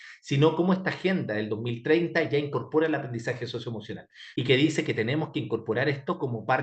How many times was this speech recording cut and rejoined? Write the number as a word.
one